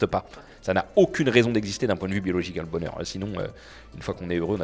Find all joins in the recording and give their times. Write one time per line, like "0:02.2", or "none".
none